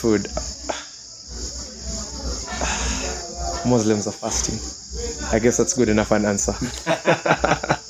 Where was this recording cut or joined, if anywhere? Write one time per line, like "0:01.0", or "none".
none